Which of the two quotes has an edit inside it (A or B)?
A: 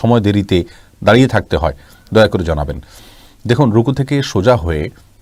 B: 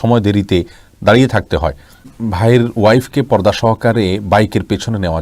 B